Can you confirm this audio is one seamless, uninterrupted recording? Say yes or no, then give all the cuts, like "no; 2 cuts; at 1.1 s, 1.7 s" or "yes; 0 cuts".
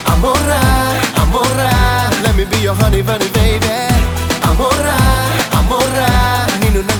yes; 0 cuts